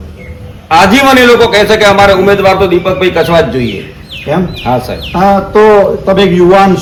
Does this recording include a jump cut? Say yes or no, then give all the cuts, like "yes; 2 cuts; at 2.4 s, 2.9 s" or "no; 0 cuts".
no; 0 cuts